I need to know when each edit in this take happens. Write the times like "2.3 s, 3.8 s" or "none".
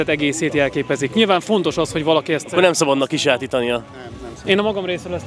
none